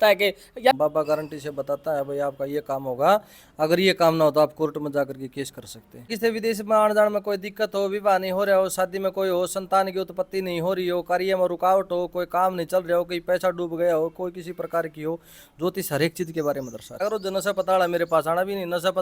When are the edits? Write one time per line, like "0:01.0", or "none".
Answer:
0:00.8
0:06.1
0:17.0